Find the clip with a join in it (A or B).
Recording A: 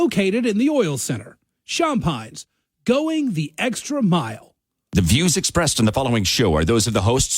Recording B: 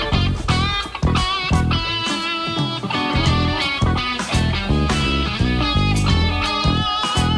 A